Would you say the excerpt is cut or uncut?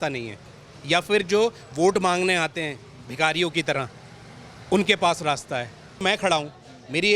cut